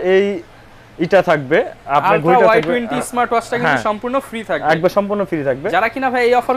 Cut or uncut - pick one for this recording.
uncut